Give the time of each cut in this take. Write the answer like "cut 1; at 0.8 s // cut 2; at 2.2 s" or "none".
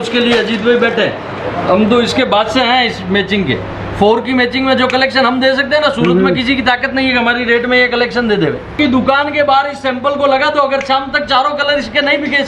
cut 1; at 8.7 s